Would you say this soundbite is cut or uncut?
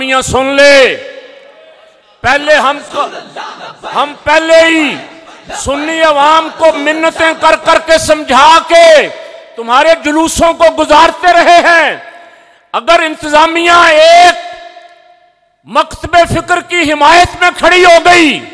uncut